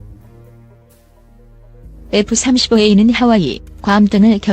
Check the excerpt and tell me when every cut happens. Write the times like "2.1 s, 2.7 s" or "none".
2.1 s